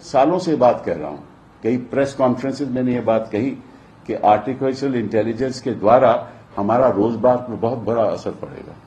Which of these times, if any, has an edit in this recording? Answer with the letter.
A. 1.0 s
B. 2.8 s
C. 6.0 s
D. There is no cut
D